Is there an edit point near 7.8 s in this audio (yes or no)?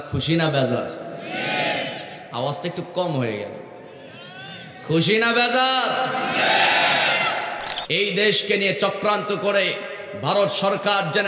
yes